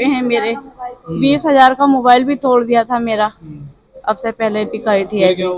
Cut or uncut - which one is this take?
uncut